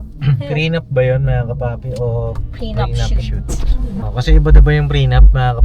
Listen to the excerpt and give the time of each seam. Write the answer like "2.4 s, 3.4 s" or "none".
4.0 s